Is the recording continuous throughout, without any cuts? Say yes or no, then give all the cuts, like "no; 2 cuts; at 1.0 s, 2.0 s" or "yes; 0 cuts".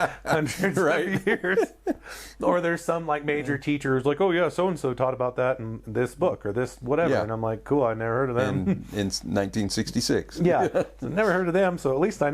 yes; 0 cuts